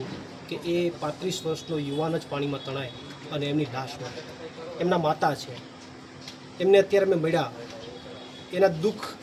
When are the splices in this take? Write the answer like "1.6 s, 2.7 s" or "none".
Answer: none